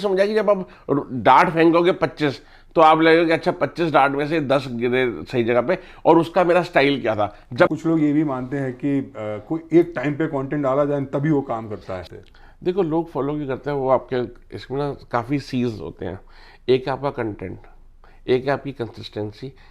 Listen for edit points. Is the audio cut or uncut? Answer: cut